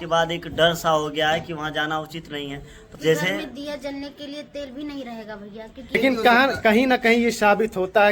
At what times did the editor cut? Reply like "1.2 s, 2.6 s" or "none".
3.0 s, 5.9 s